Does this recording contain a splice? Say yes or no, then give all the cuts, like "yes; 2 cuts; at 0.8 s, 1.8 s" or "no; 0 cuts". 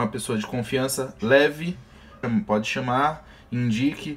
yes; 1 cut; at 2.2 s